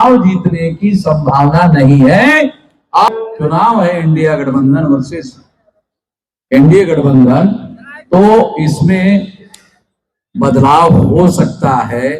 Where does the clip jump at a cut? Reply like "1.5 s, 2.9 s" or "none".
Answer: 3.1 s